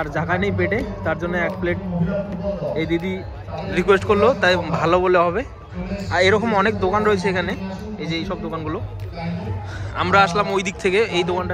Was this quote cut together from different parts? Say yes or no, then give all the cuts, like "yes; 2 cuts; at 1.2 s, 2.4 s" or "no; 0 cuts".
no; 0 cuts